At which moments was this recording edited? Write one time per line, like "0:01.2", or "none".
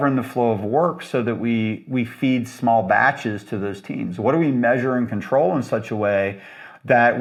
none